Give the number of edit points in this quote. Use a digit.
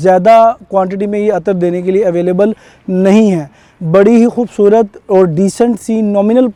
0